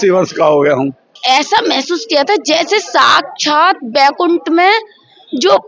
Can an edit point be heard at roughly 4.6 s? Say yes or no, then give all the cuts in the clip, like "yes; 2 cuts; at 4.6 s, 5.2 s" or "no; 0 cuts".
no; 1 cut; at 1.1 s